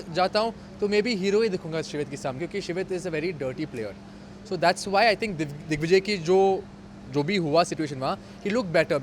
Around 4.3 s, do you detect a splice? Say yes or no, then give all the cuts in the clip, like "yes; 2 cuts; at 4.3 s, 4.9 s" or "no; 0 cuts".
no; 1 cut; at 2.4 s